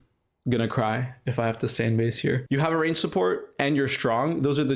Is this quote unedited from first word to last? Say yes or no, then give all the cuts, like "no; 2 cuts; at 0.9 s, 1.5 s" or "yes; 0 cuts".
yes; 0 cuts